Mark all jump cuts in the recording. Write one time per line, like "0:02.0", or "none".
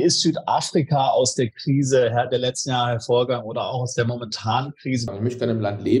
0:05.1